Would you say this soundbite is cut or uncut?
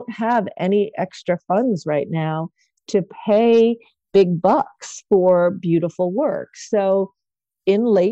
uncut